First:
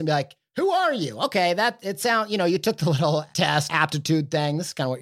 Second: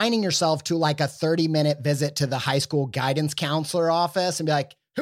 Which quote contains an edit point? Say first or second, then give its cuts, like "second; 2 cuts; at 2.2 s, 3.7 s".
first; 1 cut; at 3.6 s